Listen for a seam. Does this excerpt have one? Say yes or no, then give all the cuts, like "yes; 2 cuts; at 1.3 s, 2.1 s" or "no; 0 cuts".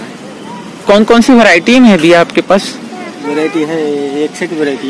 no; 0 cuts